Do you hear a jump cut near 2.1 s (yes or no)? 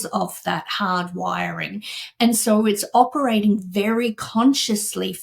no